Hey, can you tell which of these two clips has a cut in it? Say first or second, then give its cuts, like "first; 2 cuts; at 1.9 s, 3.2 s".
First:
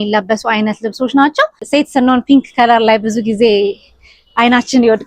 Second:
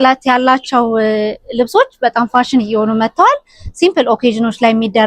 first; 1 cut; at 1.6 s